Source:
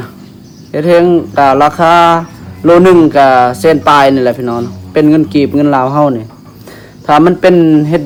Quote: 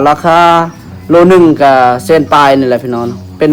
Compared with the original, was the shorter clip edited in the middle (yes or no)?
no